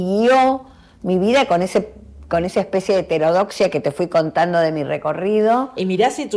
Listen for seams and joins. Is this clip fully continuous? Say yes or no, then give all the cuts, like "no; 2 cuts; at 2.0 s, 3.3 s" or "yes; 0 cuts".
yes; 0 cuts